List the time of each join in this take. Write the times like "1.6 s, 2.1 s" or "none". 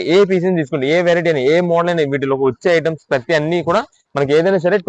none